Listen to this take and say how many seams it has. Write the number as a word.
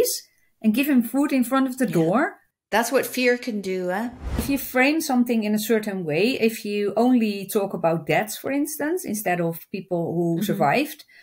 two